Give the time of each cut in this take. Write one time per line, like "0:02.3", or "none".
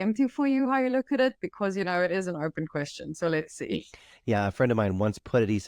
none